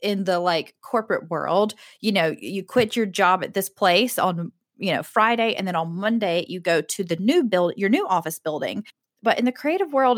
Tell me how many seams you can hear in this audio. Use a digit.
0